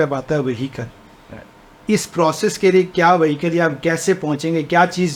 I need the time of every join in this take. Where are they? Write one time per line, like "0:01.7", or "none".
none

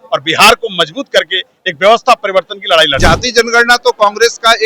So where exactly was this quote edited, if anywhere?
0:03.0

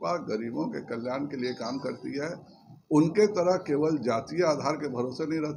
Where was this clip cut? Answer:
none

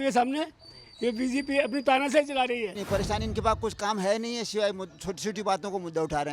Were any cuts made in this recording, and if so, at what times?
0:02.8

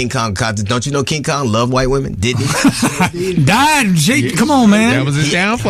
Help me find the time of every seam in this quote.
none

